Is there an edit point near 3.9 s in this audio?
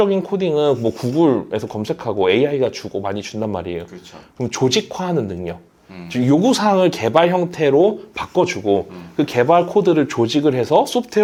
no; 0 cuts

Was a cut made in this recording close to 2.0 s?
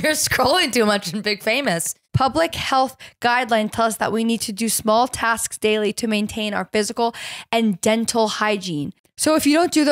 yes; 2 cuts; at 2.0 s, 9.0 s

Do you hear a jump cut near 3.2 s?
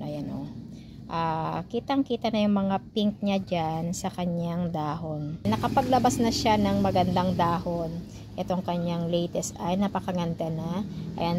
no; 1 cut; at 5.5 s

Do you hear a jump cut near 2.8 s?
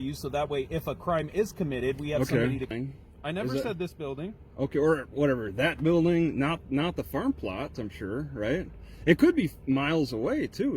yes; 1 cut; at 2.8 s

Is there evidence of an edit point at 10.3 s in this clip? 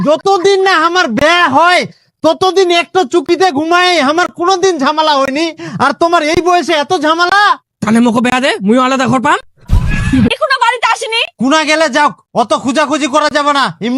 yes; 1 cut; at 10.3 s

